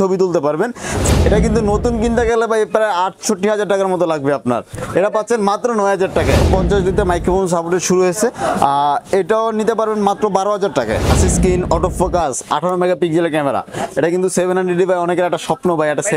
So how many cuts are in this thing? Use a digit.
3